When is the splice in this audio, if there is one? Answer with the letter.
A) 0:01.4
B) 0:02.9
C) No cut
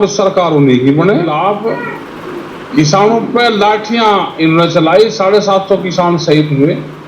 A